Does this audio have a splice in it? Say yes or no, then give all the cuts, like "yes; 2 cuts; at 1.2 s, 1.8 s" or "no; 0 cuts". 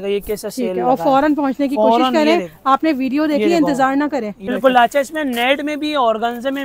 yes; 1 cut; at 4.5 s